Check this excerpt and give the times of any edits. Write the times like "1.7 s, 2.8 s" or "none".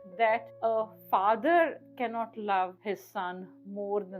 2.8 s